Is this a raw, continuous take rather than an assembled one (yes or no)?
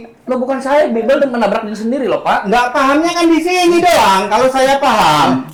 yes